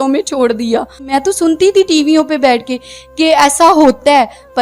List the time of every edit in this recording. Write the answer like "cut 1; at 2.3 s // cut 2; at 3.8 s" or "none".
cut 1; at 1.1 s